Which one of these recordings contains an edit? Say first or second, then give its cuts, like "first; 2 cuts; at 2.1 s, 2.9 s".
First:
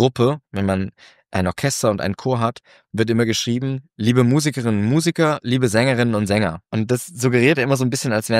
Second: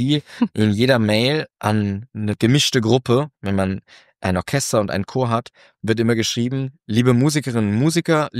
first; 1 cut; at 6.6 s